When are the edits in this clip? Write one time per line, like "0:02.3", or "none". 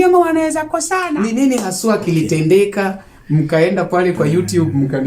0:01.1